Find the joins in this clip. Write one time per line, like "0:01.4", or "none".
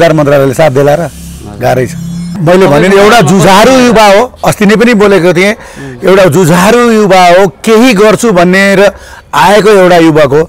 0:02.2